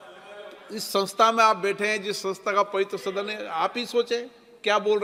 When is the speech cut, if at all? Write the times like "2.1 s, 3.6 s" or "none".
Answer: none